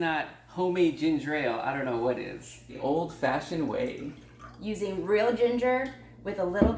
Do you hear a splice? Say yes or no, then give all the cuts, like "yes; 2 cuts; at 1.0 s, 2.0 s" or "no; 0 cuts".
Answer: yes; 1 cut; at 2.8 s